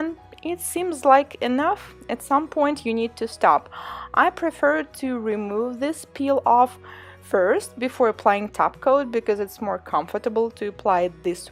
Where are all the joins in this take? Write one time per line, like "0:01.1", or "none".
none

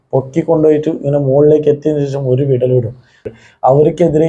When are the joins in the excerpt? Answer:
0:03.2

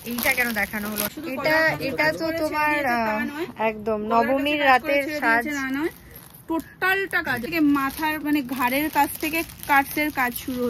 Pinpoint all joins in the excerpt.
0:01.1
0:07.5

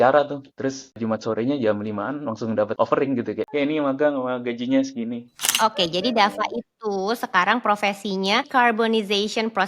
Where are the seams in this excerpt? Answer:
0:01.0
0:02.7
0:03.5
0:05.4
0:08.5

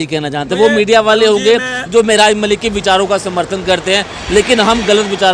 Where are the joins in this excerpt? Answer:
none

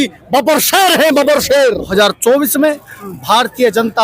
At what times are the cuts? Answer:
0:01.9

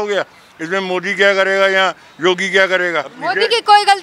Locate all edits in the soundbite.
0:03.1

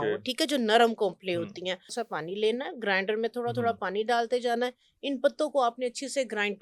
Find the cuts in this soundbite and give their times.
0:01.9

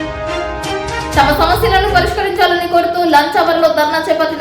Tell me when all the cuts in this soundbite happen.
0:01.1

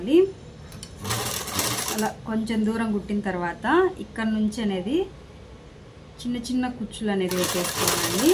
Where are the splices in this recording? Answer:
none

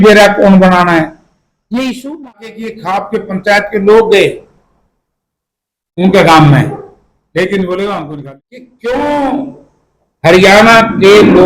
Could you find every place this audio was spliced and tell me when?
0:02.5
0:08.1

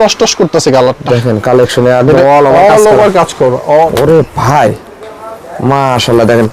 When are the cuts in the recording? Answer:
0:03.9

